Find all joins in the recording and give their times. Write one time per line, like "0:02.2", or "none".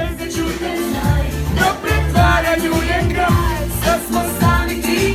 none